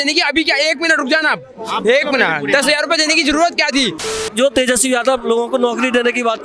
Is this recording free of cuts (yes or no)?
no